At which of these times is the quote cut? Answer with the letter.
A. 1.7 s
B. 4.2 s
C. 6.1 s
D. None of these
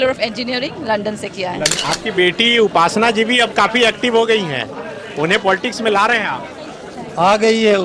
A